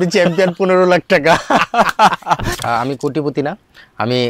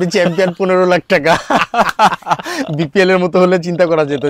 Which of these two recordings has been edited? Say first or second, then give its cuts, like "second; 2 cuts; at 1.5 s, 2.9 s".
first; 1 cut; at 2.5 s